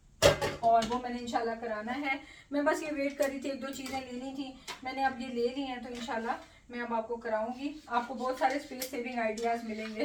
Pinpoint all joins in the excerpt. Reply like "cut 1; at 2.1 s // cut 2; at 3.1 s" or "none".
none